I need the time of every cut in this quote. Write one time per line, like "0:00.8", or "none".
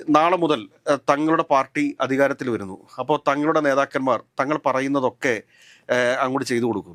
none